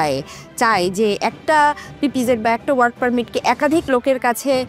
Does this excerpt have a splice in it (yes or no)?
no